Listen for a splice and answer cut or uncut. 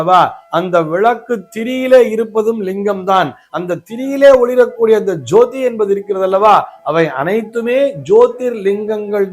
uncut